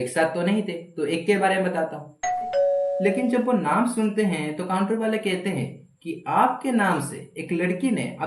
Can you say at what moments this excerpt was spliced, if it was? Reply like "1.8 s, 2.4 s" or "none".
2.5 s